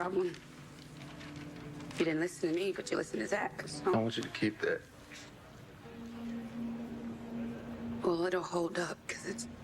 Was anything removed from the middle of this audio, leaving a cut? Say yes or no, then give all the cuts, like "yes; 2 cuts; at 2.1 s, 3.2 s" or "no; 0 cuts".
yes; 1 cut; at 3.9 s